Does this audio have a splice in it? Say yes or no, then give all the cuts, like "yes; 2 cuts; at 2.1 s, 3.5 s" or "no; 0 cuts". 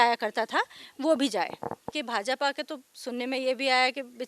yes; 1 cut; at 1.9 s